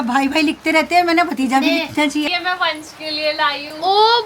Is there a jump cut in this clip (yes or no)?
yes